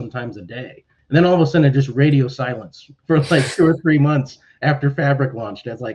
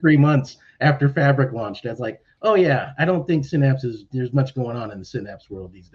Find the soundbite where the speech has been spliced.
first; 2 cuts; at 0.9 s, 2.9 s

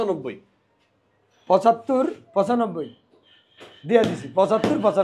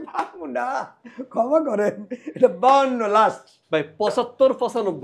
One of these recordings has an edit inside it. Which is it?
second; 1 cut; at 3.5 s

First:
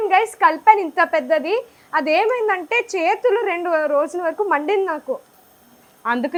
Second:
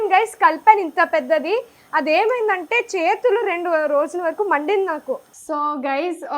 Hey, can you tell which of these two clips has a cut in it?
second; 1 cut; at 5.3 s

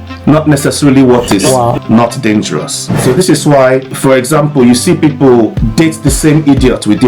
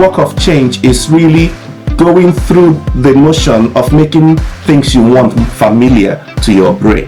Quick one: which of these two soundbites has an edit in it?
first; 3 cuts; at 2.9 s, 3.9 s, 5.6 s

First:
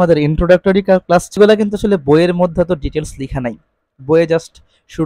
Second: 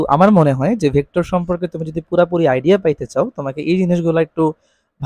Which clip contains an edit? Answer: first; 1 cut; at 1.3 s

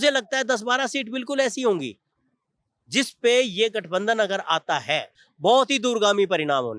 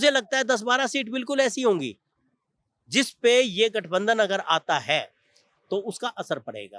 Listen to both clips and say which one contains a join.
first; 1 cut; at 5.2 s

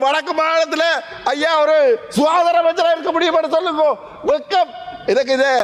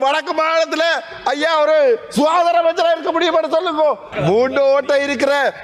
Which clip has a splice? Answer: second; 1 cut; at 4.1 s

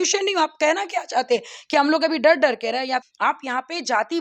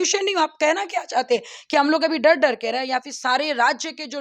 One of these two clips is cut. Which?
first; 1 cut; at 3.1 s

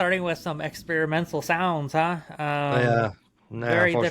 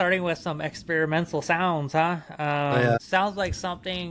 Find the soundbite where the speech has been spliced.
second; 1 cut; at 3.0 s

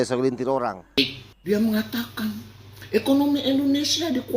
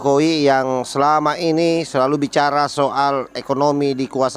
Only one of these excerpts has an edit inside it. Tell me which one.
first; 1 cut; at 1.0 s

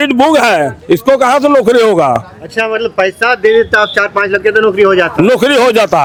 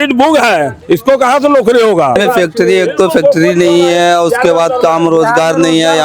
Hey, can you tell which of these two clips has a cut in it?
second; 1 cut; at 2.2 s

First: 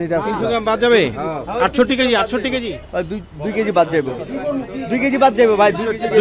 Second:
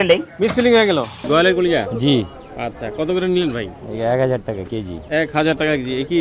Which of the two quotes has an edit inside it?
second; 2 cuts; at 1.2 s, 4.9 s

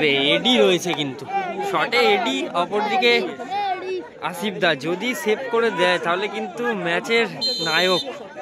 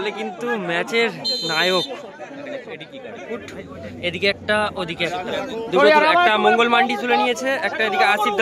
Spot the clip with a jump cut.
second; 1 cut; at 3.4 s

